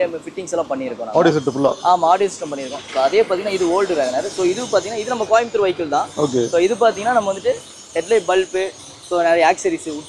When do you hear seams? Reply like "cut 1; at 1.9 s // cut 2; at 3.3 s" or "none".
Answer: none